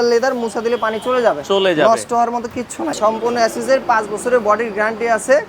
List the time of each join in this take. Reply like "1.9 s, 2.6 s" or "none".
2.9 s

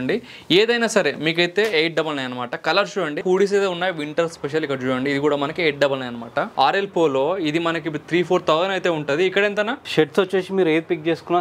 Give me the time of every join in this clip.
3.2 s, 6.5 s

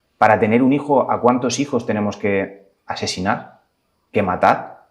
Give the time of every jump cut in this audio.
none

